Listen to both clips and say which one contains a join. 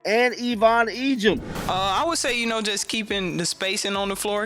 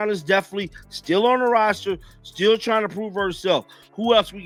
first; 1 cut; at 1.5 s

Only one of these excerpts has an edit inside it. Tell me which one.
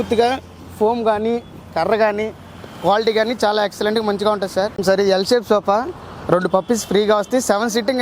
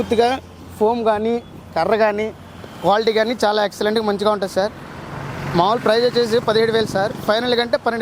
first; 1 cut; at 4.8 s

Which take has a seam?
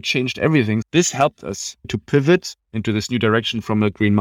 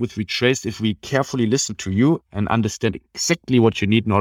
first; 2 cuts; at 0.8 s, 1.9 s

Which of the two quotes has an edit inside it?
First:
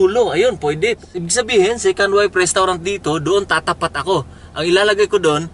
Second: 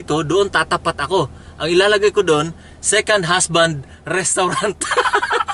first; 1 cut; at 1.0 s

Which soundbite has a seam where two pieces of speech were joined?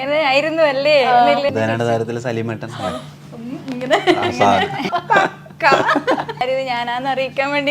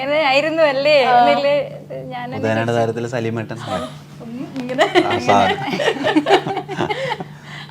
first; 3 cuts; at 1.5 s, 4.9 s, 6.4 s

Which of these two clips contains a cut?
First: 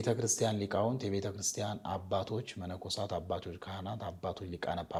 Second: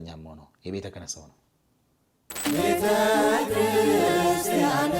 second; 1 cut; at 2.5 s

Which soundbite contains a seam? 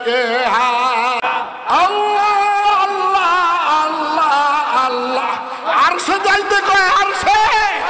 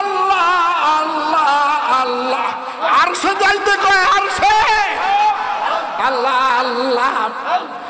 first; 1 cut; at 1.2 s

